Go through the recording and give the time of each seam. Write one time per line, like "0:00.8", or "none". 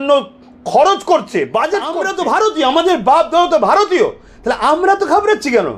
0:02.0